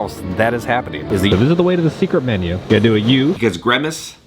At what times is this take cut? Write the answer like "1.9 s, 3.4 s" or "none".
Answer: 1.2 s, 2.6 s, 3.4 s